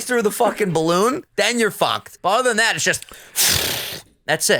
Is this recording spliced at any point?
yes; 1 cut; at 2.1 s

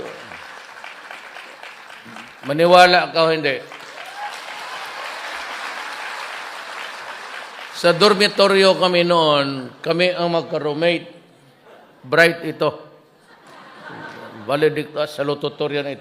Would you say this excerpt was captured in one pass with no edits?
yes; 0 cuts

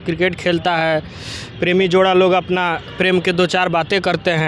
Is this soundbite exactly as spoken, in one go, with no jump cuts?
yes; 0 cuts

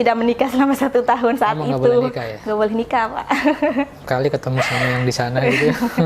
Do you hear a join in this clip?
no; 0 cuts

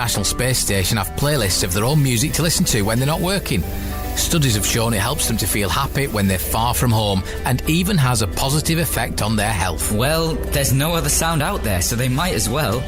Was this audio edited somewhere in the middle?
no; 0 cuts

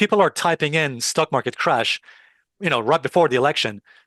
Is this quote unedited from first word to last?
yes; 0 cuts

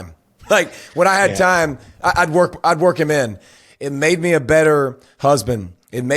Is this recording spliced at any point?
yes; 1 cut; at 3.5 s

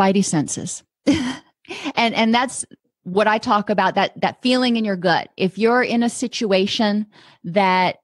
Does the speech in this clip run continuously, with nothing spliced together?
yes; 0 cuts

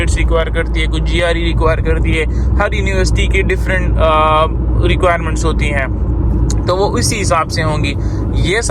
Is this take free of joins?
yes; 0 cuts

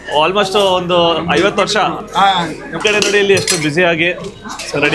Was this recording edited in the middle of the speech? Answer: yes; 1 cut; at 2.2 s

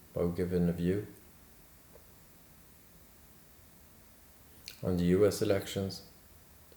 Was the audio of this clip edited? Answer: yes; 1 cut; at 3.0 s

